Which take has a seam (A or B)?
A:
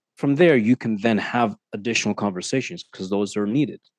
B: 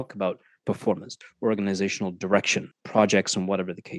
B